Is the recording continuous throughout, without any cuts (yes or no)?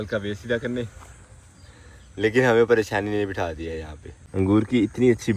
yes